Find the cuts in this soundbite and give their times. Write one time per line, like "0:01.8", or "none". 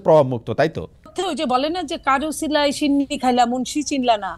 0:01.1